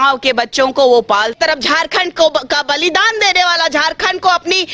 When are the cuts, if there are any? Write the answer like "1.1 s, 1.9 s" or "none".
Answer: 1.3 s